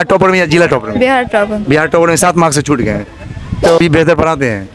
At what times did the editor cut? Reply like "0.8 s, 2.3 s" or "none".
3.8 s